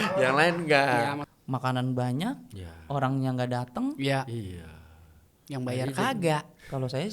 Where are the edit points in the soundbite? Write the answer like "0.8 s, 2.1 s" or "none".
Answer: 1.3 s